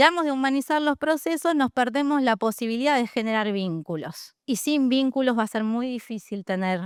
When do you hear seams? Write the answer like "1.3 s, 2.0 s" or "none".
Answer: none